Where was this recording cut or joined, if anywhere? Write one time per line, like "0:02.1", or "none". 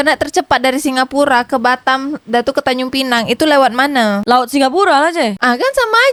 none